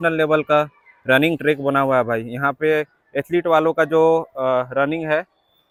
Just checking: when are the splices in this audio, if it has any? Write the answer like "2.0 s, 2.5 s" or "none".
none